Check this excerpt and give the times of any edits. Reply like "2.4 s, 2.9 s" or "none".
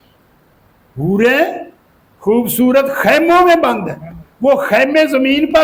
none